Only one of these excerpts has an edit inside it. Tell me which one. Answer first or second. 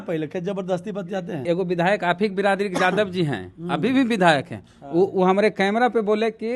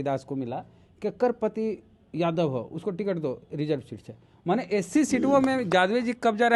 first